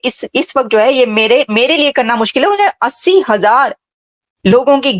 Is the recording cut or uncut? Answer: uncut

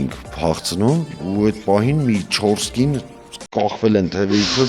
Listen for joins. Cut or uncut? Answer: cut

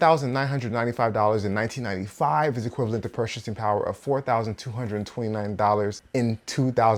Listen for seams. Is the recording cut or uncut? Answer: uncut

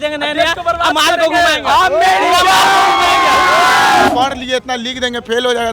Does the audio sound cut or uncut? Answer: cut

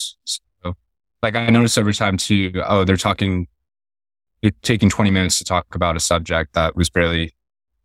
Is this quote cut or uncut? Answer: uncut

